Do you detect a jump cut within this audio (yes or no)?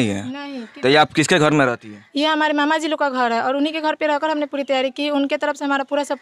no